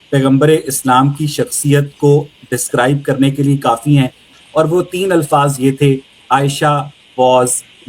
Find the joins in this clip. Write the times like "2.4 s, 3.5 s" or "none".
4.3 s

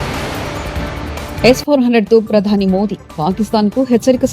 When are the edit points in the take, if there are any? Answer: 1.4 s

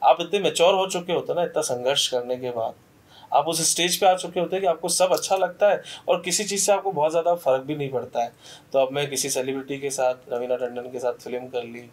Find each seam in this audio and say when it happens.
none

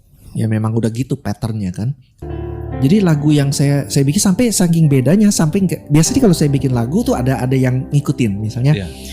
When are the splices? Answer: 2.2 s

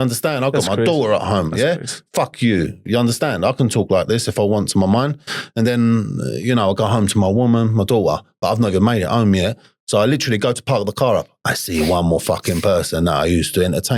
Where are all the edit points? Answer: none

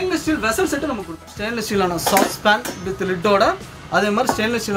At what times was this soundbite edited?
1.1 s

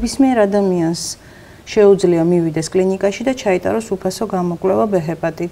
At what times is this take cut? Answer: none

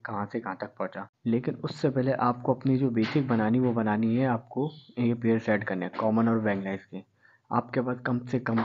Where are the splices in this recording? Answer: 1.0 s

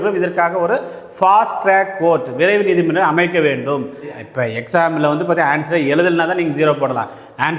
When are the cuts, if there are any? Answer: 4.1 s

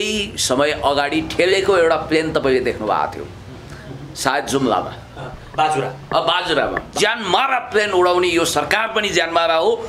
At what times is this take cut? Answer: 6.8 s

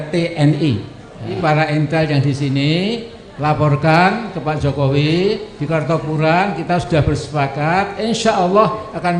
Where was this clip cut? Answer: 1.4 s

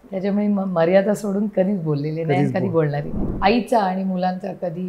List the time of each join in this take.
3.2 s

